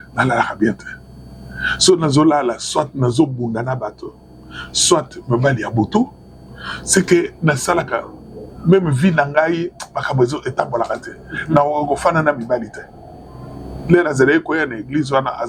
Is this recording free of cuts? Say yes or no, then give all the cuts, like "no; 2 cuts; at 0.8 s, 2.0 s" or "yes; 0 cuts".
yes; 0 cuts